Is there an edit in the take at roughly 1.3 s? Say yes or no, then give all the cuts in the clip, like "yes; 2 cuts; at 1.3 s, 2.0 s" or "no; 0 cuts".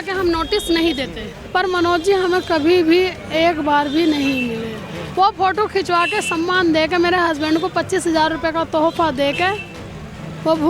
yes; 1 cut; at 1.3 s